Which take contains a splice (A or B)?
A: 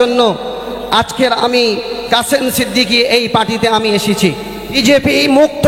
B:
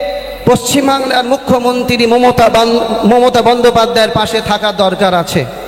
A